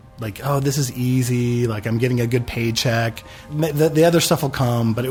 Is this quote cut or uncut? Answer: uncut